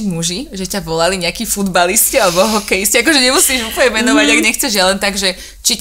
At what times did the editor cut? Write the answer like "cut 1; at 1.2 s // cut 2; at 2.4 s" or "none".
none

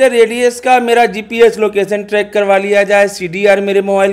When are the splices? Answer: none

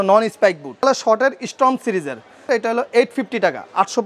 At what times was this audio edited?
cut 1; at 0.8 s // cut 2; at 2.5 s

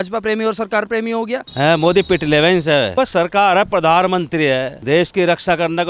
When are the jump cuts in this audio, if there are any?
cut 1; at 1.5 s

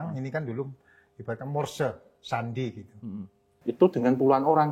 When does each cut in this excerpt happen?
cut 1; at 3.5 s

